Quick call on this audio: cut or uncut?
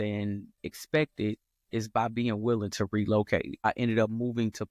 cut